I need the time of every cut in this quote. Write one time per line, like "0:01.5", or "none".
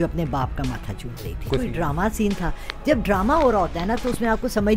0:01.5